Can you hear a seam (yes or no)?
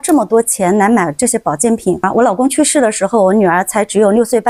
yes